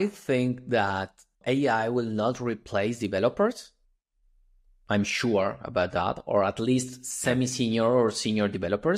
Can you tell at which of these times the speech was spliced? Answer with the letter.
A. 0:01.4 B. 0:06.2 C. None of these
A